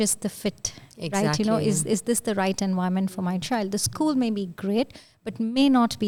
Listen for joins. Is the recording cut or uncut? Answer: uncut